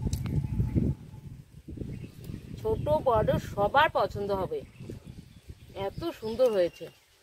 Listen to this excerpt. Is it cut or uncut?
uncut